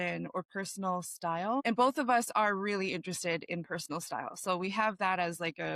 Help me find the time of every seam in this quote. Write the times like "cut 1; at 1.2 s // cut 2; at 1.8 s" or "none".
cut 1; at 1.6 s